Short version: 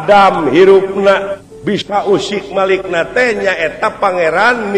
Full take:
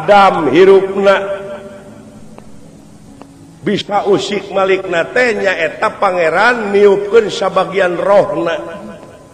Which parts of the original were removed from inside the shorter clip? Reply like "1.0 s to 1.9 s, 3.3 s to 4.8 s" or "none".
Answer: 1.5 s to 3.5 s